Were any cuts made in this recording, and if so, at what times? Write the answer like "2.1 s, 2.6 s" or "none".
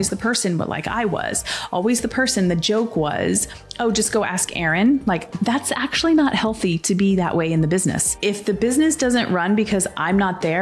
5.3 s, 8.1 s